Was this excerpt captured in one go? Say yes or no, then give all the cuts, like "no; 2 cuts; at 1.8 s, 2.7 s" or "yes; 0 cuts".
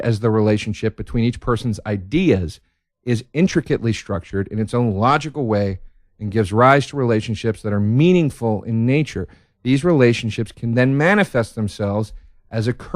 no; 1 cut; at 7.7 s